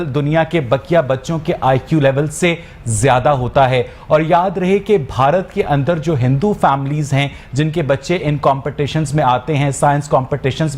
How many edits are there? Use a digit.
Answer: 0